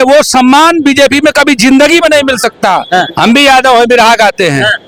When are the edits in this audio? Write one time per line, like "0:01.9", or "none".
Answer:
none